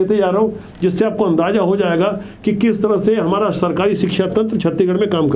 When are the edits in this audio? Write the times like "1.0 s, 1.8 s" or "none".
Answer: none